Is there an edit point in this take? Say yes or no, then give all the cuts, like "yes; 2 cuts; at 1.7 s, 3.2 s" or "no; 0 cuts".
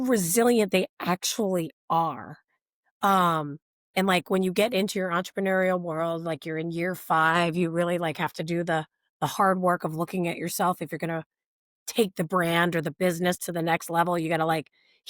no; 0 cuts